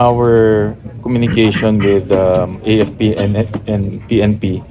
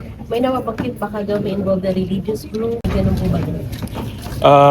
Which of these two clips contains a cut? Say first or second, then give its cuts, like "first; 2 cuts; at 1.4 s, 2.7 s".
second; 1 cut; at 2.9 s